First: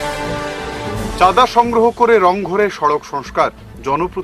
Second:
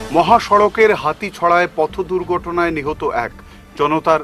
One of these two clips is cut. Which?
first; 1 cut; at 1.1 s

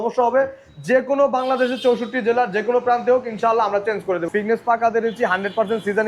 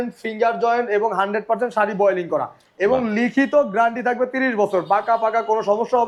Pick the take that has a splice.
first; 1 cut; at 4.3 s

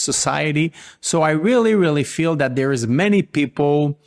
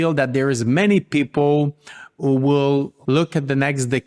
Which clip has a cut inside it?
second; 1 cut; at 2.9 s

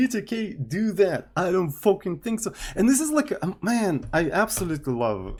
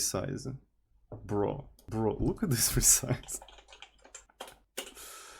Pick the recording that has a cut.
second; 2 cuts; at 1.7 s, 4.3 s

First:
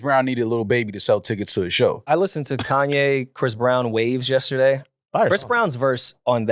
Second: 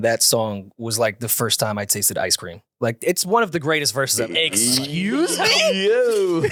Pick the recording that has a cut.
first; 1 cut; at 2.0 s

